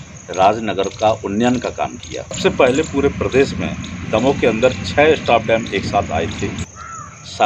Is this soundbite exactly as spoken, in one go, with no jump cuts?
no; 2 cuts; at 2.4 s, 6.6 s

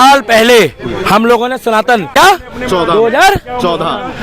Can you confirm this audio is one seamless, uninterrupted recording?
no; 1 cut; at 2.4 s

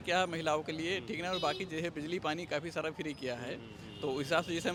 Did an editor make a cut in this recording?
no; 0 cuts

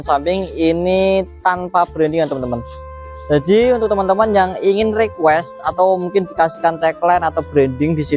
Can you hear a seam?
no; 0 cuts

